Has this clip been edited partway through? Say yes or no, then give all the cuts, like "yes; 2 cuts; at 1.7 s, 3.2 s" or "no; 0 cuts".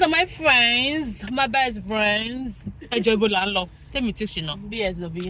no; 0 cuts